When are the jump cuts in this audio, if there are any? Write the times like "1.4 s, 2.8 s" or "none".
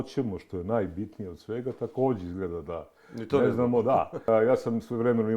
4.3 s